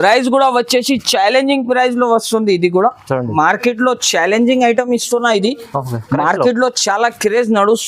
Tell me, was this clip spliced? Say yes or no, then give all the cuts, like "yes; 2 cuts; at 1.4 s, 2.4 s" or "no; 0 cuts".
yes; 1 cut; at 3.3 s